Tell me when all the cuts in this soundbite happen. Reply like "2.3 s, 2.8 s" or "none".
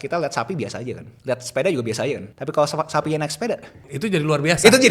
1.1 s, 2.3 s, 3.8 s